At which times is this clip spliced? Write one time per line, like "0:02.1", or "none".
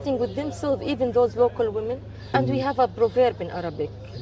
0:02.3